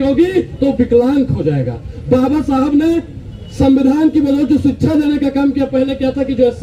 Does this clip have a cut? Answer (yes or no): no